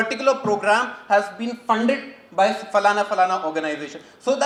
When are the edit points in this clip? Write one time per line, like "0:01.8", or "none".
none